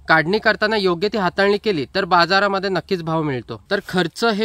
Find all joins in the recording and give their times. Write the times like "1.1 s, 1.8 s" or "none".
3.5 s